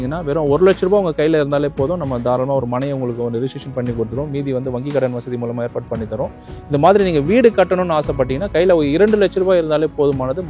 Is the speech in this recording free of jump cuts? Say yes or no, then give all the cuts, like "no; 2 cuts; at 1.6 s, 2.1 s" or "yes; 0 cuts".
yes; 0 cuts